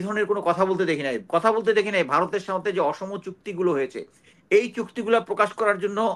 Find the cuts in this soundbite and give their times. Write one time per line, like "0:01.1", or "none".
none